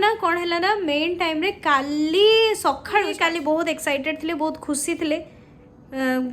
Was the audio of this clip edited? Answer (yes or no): yes